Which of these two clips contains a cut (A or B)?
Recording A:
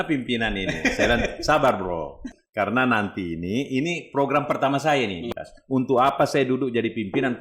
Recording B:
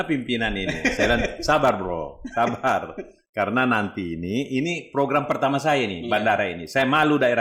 A